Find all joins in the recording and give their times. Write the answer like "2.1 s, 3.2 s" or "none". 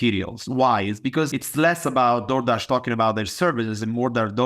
1.3 s